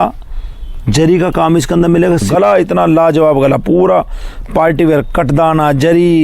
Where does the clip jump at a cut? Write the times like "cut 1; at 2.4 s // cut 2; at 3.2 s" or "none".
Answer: cut 1; at 2.3 s